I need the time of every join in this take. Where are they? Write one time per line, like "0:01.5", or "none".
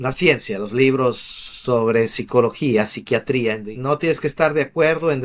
0:03.7